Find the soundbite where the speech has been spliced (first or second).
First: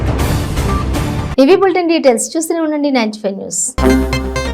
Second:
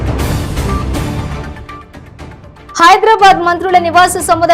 second